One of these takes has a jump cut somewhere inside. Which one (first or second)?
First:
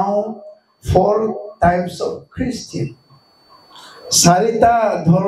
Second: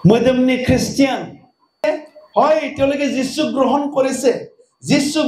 second